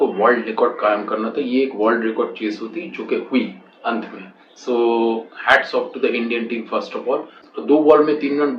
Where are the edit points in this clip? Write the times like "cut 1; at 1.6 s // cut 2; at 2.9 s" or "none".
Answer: cut 1; at 7.4 s